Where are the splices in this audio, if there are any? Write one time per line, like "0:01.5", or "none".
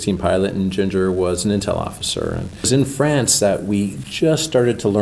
0:02.7

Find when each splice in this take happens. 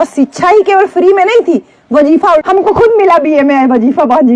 0:02.4

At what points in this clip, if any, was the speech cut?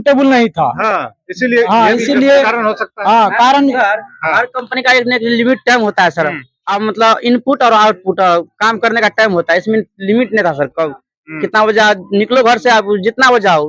none

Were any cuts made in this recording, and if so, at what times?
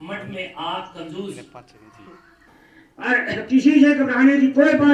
0:02.4

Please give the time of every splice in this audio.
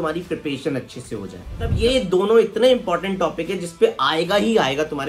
0:01.7

